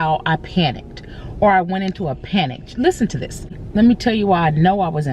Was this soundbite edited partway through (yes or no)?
yes